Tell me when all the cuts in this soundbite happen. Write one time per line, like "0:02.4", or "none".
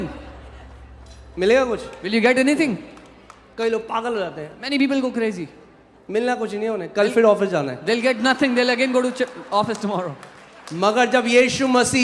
none